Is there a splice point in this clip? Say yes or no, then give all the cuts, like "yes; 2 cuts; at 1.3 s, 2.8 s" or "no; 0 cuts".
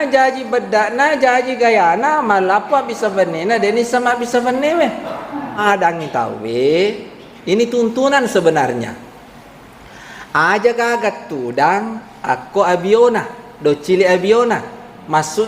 yes; 1 cut; at 5.6 s